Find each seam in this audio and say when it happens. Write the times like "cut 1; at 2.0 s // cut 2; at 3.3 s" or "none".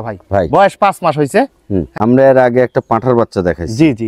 cut 1; at 1.9 s